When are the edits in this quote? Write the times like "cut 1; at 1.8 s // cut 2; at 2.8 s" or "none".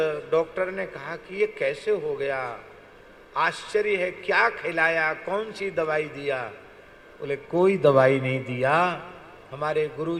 none